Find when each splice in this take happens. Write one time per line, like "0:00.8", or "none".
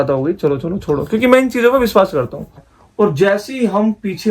0:02.7